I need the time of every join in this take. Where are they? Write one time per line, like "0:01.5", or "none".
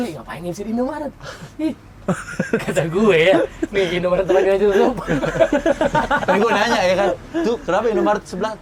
none